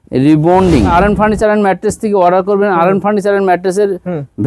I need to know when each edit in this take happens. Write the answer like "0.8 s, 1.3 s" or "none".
0.9 s